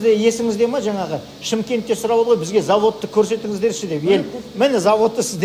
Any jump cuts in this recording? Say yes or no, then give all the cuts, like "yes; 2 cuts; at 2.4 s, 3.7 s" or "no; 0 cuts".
no; 0 cuts